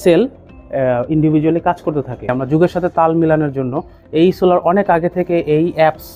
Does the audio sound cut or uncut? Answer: cut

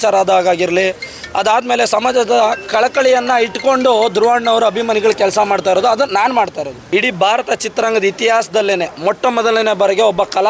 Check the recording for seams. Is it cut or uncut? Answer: cut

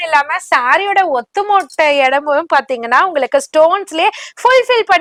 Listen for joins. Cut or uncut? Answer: uncut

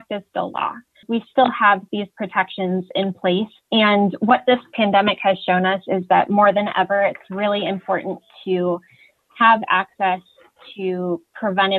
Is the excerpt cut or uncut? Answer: cut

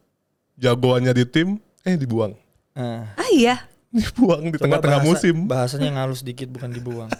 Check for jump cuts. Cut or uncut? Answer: uncut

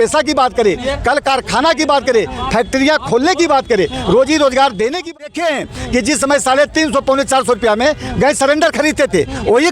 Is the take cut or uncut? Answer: cut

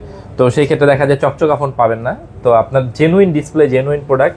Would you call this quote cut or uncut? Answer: uncut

